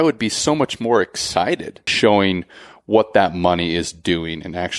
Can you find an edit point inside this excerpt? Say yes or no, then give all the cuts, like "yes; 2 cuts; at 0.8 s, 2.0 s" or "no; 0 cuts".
yes; 1 cut; at 1.9 s